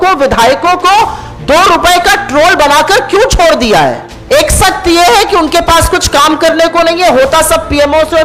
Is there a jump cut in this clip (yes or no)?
yes